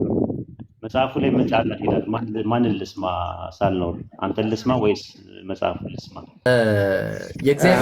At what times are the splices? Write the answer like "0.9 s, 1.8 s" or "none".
6.5 s